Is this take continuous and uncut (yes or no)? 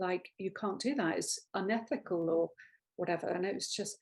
yes